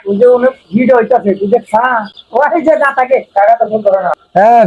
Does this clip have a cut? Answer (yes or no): no